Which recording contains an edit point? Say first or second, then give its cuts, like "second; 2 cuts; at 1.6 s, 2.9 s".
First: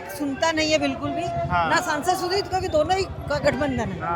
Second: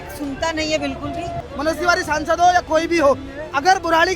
second; 1 cut; at 1.5 s